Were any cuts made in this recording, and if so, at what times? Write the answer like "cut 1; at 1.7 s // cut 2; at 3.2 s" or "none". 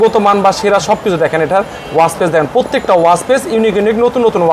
none